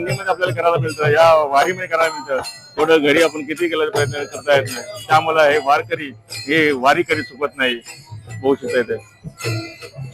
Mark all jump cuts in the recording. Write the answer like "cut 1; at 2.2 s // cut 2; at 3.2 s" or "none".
none